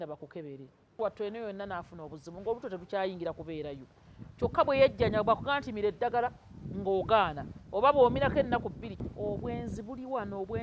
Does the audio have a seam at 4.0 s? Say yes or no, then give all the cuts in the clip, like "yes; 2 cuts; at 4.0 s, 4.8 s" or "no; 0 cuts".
no; 2 cuts; at 0.9 s, 8.9 s